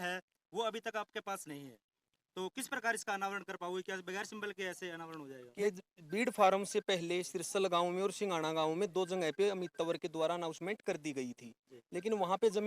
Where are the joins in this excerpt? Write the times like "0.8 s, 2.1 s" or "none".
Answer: 5.6 s